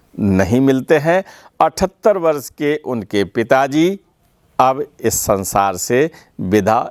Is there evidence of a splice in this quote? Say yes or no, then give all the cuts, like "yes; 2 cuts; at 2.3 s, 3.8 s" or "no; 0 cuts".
no; 0 cuts